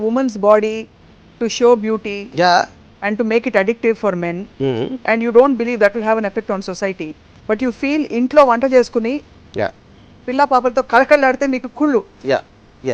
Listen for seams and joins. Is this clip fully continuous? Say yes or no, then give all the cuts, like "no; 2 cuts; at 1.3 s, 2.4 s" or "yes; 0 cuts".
yes; 0 cuts